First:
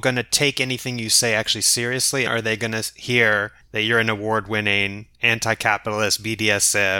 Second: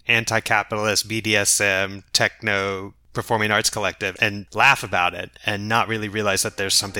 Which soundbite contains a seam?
first; 1 cut; at 2.3 s

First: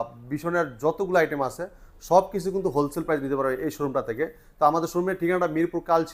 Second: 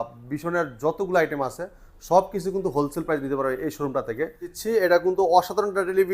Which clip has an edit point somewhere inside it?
second; 1 cut; at 4.5 s

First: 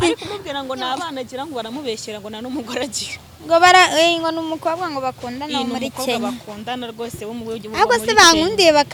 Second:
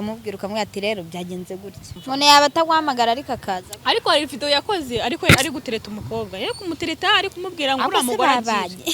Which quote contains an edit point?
second; 1 cut; at 2.0 s

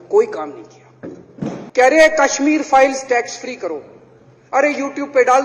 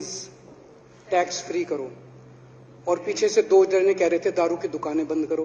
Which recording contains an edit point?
first; 1 cut; at 1.6 s

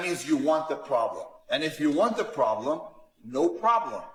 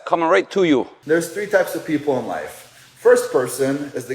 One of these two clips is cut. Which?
second; 1 cut; at 0.9 s

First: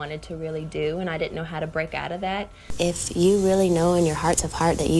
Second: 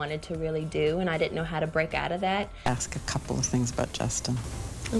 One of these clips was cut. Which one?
second; 1 cut; at 2.5 s

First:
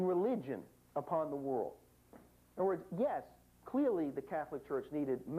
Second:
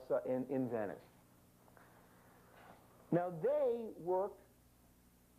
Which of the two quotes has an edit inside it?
first; 1 cut; at 1.5 s

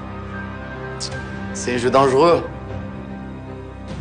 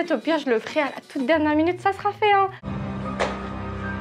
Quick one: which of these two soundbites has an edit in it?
second; 1 cut; at 2.6 s

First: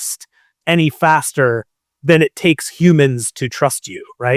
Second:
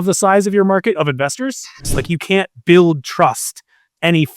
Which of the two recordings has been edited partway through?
second; 1 cut; at 1.9 s

